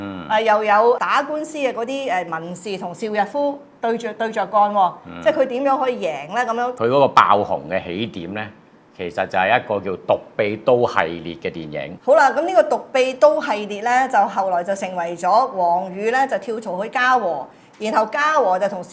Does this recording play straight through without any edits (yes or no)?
no